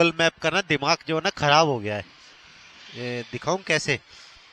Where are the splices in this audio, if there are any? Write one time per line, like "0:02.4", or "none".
none